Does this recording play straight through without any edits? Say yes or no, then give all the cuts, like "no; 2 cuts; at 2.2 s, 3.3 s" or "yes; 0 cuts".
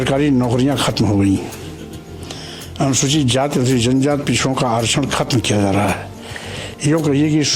yes; 0 cuts